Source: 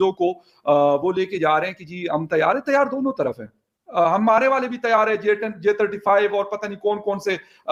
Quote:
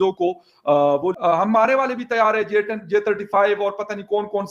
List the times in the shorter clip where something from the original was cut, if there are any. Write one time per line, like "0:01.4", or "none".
0:01.1